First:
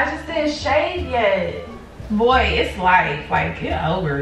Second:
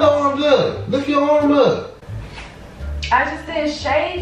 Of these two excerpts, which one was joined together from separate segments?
first; 1 cut; at 1.9 s

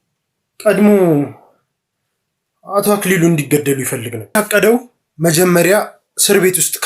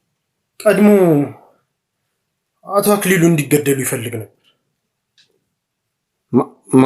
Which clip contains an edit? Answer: first; 1 cut; at 4.3 s

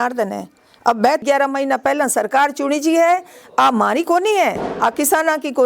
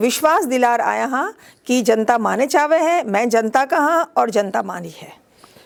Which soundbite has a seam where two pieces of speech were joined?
first; 1 cut; at 1.2 s

